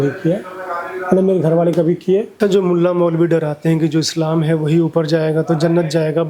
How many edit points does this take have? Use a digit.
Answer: 1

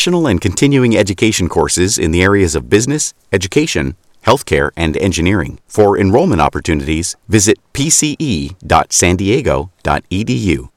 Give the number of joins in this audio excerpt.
0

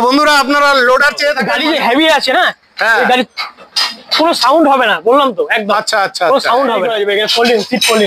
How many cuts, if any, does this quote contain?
2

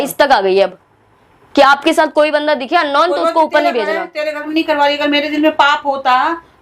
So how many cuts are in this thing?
1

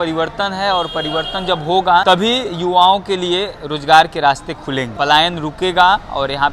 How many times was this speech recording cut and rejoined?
2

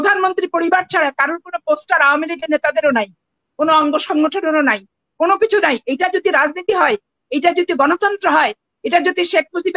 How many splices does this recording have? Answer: 0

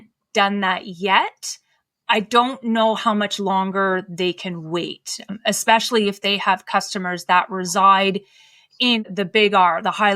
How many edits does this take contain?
2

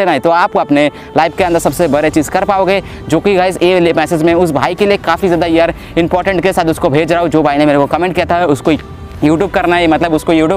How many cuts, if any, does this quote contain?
0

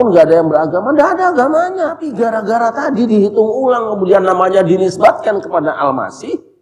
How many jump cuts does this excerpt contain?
1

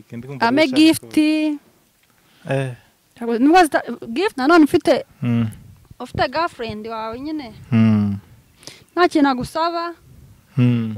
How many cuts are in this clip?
1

